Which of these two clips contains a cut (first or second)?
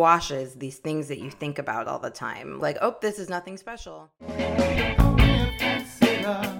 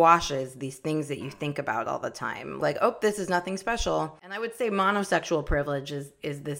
second